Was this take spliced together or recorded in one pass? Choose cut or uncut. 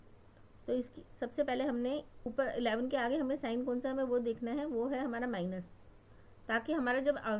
cut